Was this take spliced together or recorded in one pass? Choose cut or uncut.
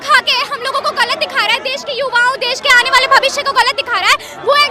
uncut